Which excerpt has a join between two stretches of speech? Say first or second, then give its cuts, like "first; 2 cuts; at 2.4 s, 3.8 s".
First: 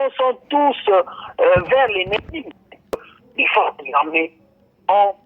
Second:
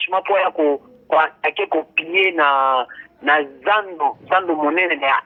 first; 1 cut; at 3.0 s